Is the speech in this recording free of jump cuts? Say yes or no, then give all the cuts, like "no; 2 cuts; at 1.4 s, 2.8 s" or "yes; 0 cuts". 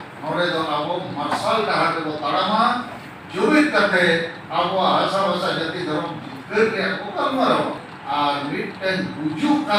no; 1 cut; at 7.9 s